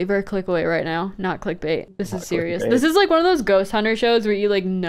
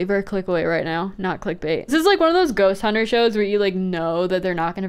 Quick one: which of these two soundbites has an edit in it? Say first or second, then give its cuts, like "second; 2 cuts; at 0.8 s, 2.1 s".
second; 1 cut; at 1.9 s